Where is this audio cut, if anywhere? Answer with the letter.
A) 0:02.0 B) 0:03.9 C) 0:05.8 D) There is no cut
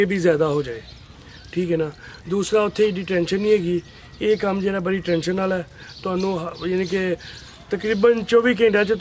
D